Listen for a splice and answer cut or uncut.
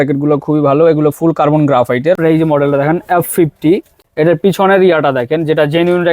cut